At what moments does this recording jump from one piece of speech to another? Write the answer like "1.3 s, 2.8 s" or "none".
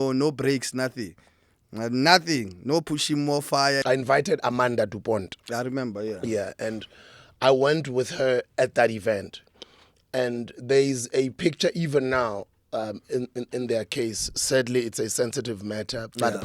3.8 s